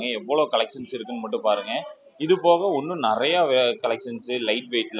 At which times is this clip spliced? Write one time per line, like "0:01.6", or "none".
none